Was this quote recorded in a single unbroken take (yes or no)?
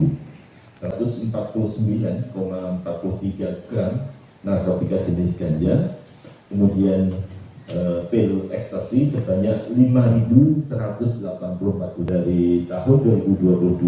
no